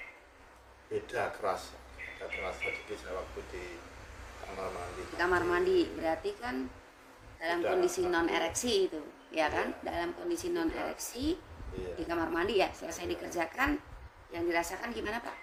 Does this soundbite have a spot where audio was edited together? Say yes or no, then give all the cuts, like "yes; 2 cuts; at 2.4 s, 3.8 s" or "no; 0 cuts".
no; 0 cuts